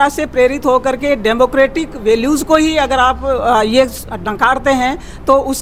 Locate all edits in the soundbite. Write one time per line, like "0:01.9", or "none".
none